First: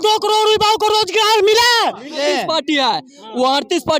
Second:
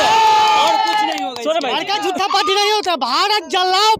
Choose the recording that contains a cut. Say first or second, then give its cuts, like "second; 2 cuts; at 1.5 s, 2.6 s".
first; 1 cut; at 2.2 s